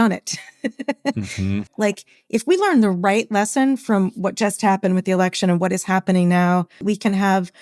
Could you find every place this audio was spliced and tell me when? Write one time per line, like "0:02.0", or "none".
0:01.7
0:06.8